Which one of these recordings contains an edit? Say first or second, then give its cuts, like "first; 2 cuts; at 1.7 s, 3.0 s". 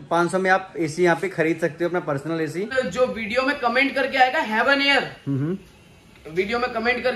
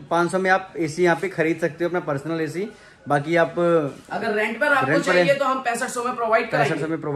first; 1 cut; at 2.7 s